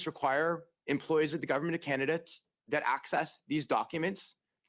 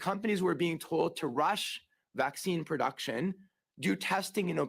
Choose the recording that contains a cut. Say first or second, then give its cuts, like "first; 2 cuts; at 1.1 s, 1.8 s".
second; 1 cut; at 3.4 s